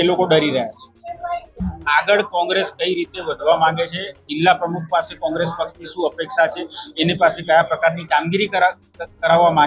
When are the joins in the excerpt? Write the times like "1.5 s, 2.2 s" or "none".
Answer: 1.5 s